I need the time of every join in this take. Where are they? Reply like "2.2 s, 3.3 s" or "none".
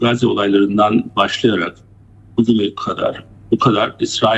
none